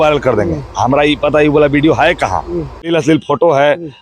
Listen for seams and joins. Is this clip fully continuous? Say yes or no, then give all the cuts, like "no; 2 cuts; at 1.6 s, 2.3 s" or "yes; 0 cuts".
no; 1 cut; at 2.8 s